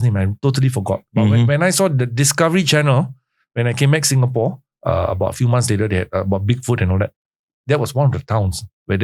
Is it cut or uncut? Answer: uncut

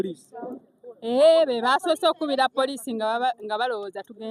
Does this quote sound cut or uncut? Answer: uncut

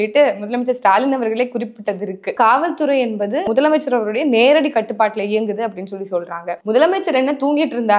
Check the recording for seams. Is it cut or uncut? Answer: cut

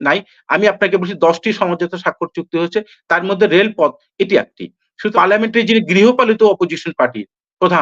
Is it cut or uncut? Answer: cut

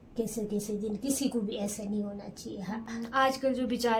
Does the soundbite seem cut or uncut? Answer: uncut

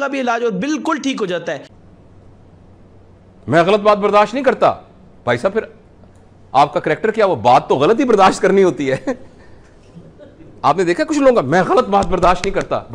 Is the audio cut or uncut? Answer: cut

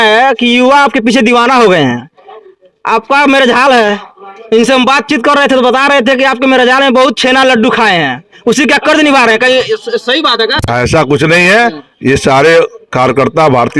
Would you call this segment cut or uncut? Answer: uncut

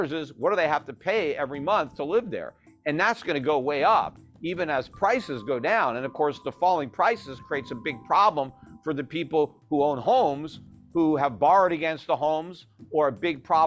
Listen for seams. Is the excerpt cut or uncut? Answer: uncut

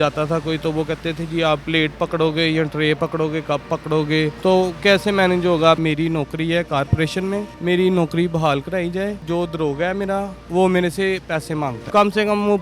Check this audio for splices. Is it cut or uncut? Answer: cut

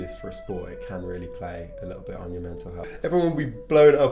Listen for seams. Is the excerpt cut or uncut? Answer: cut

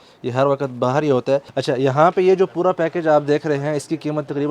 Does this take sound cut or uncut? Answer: cut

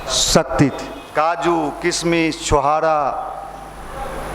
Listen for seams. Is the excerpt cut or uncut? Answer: cut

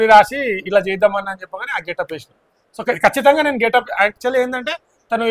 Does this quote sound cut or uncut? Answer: uncut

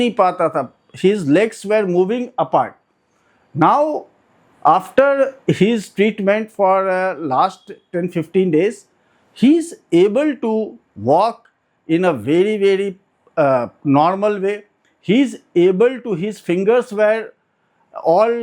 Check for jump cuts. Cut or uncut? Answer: uncut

